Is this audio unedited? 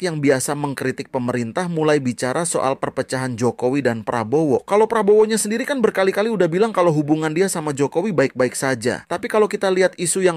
yes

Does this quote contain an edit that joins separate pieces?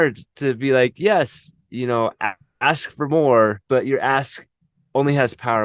yes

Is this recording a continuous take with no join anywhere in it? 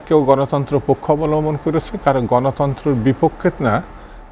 yes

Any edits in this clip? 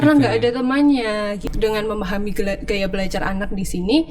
yes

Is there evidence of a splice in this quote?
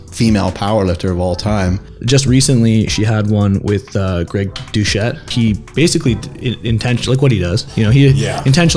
yes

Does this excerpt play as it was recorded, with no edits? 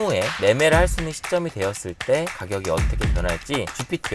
yes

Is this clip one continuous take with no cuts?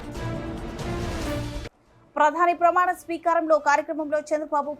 no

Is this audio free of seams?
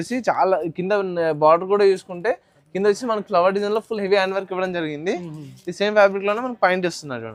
yes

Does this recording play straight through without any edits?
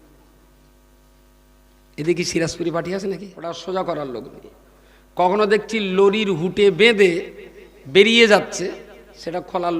no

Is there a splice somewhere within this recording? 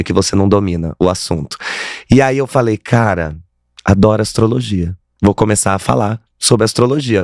no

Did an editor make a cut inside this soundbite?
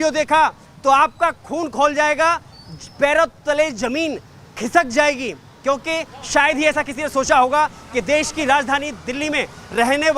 no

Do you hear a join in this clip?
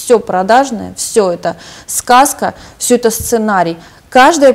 no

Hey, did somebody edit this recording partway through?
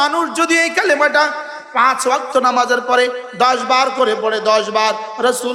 no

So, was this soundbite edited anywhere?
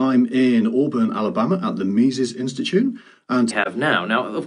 no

